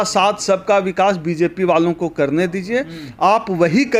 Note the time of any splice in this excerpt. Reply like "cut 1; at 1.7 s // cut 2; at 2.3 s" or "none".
none